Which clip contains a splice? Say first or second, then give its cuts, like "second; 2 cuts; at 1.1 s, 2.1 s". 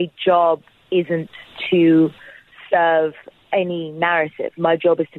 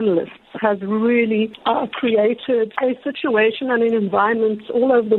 second; 2 cuts; at 1.6 s, 2.7 s